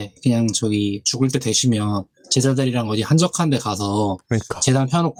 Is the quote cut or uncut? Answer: uncut